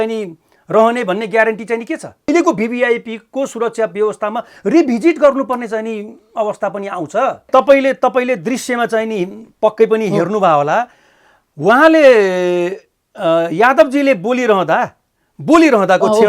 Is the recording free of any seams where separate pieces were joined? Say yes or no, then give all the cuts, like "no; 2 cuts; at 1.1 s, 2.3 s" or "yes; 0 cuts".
no; 2 cuts; at 2.3 s, 7.5 s